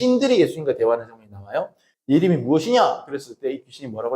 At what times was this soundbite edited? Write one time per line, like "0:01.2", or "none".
0:01.8